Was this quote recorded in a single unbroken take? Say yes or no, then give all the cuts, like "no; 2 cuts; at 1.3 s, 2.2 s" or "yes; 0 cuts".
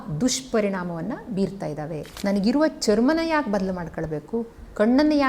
no; 1 cut; at 2.0 s